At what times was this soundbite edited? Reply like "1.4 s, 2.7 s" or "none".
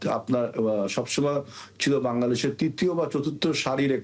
none